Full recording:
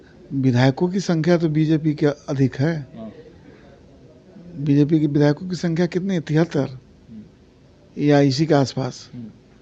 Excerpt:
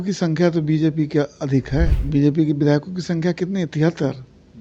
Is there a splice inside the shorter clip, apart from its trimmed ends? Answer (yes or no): yes